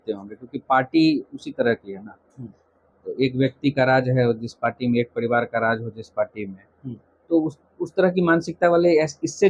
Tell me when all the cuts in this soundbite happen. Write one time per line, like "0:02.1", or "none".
none